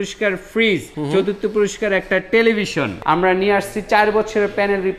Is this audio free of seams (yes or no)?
no